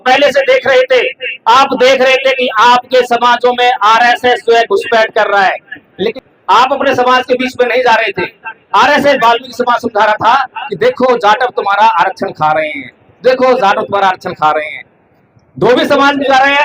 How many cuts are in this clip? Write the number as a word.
two